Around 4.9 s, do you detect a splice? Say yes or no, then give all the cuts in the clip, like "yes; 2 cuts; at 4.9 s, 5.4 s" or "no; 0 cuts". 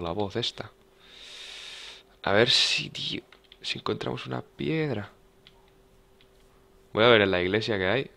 yes; 1 cut; at 4.9 s